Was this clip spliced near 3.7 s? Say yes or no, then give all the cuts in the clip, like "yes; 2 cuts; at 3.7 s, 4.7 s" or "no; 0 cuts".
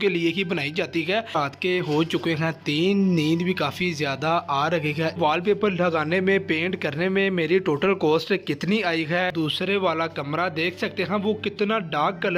no; 3 cuts; at 1.3 s, 5.1 s, 9.3 s